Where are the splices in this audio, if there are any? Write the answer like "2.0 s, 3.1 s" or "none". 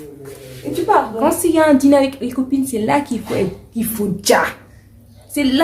1.1 s

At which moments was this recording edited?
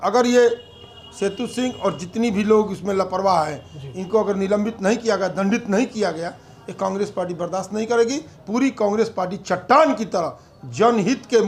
none

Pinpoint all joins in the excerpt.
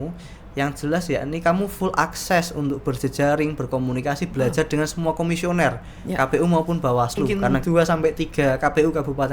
7.5 s

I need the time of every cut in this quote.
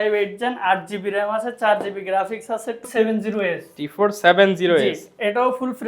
2.9 s

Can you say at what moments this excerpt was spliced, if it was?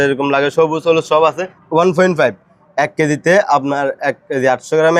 1.5 s

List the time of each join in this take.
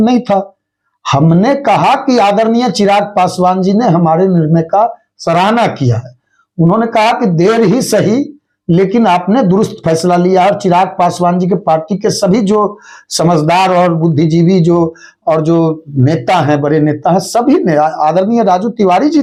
none

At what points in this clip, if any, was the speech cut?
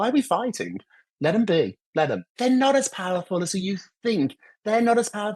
2.1 s

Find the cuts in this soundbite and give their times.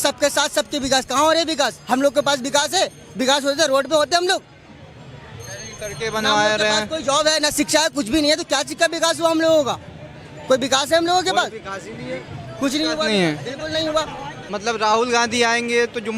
none

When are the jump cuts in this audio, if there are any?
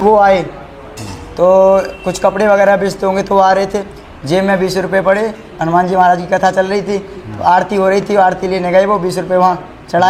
none

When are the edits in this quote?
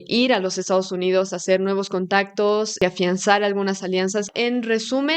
2.8 s, 4.3 s

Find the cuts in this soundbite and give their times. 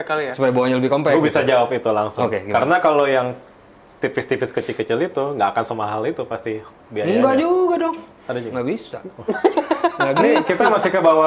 none

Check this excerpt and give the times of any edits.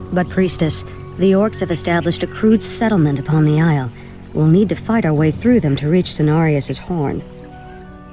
7.2 s

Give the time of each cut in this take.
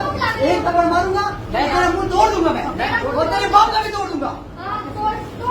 none

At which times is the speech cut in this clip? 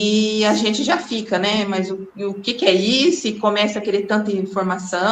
none

